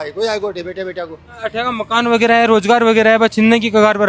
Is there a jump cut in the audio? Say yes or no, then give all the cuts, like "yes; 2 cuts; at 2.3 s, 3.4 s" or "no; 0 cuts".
yes; 1 cut; at 1.4 s